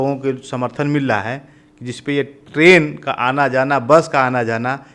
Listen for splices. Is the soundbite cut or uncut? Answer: uncut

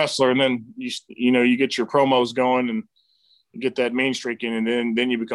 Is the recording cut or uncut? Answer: uncut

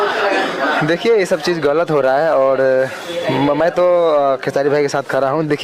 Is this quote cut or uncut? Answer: uncut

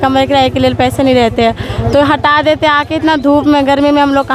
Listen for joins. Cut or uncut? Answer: uncut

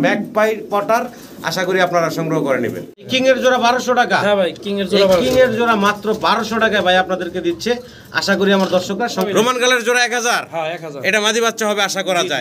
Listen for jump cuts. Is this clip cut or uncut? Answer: cut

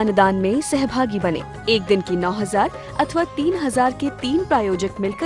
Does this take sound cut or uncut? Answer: uncut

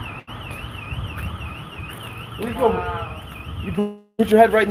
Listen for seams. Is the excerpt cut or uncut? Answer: uncut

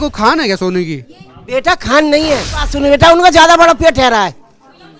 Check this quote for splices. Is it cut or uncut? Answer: cut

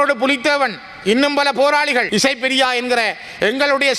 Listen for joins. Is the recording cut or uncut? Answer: cut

